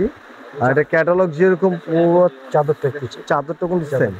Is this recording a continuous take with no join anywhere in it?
yes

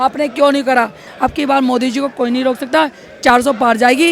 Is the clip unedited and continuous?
no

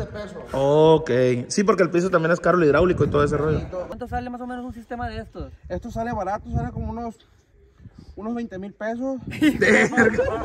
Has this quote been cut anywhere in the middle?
yes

